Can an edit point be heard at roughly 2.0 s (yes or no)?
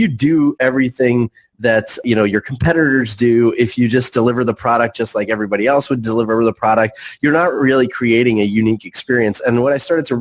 yes